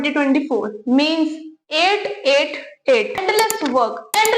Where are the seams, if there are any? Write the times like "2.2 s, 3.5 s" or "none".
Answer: 3.2 s